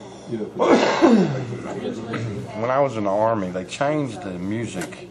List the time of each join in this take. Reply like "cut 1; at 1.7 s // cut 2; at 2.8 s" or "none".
cut 1; at 2.8 s

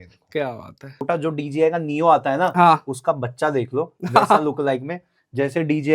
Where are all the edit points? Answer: cut 1; at 1.0 s

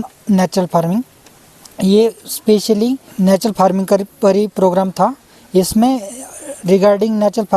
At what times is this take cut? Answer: cut 1; at 3.1 s

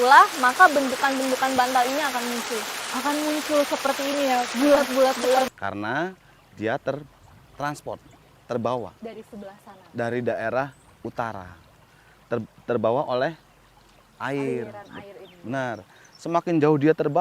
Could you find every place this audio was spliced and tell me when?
cut 1; at 5.5 s

